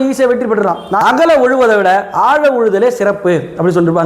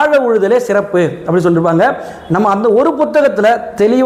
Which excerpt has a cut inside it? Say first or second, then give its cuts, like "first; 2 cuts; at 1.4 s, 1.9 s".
first; 1 cut; at 1.0 s